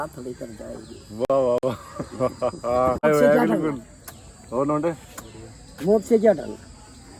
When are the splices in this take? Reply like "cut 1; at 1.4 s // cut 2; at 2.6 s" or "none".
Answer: none